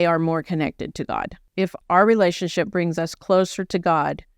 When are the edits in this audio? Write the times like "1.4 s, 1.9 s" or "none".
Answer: 1.8 s